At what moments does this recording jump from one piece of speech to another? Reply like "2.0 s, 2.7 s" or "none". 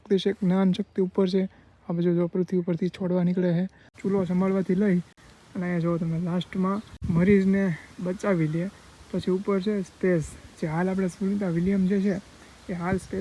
3.9 s, 6.9 s